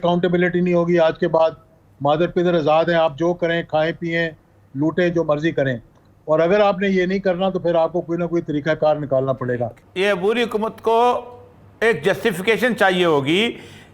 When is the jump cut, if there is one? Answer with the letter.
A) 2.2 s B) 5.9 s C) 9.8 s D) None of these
C